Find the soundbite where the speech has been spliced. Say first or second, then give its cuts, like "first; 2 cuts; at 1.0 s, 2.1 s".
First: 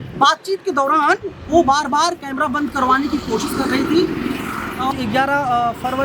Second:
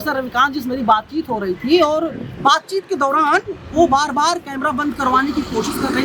first; 1 cut; at 4.9 s